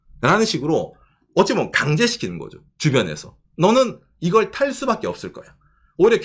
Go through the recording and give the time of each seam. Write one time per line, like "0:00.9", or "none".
none